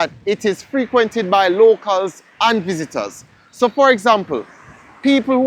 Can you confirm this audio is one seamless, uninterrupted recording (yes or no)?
yes